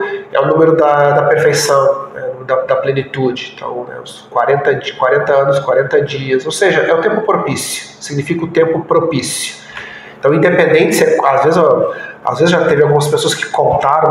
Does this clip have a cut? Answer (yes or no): no